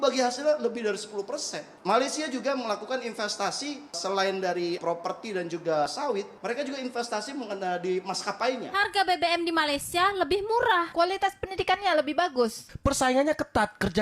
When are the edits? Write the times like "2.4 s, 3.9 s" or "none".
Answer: 8.7 s